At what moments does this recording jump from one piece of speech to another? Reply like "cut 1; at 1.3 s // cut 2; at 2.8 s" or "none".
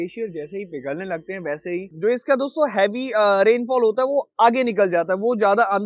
cut 1; at 1.9 s